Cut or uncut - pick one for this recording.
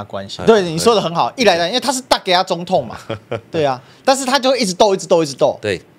uncut